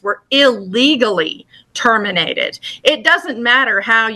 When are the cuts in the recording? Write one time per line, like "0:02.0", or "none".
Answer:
none

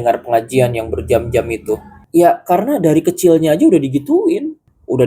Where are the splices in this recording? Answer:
0:01.9

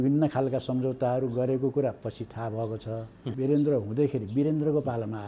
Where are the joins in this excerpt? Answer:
0:03.2

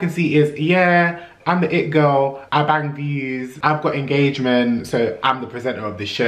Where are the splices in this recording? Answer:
0:02.4
0:03.5

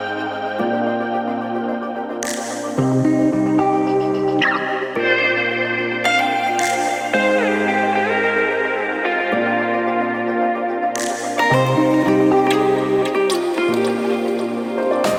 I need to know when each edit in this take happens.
none

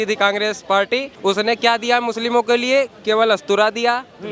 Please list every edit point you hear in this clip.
0:01.1

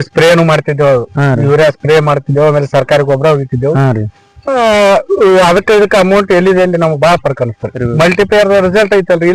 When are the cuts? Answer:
0:07.8

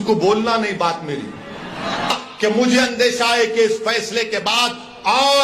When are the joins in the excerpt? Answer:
0:02.1

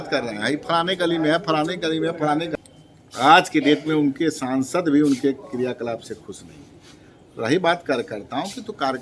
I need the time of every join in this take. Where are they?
0:02.5

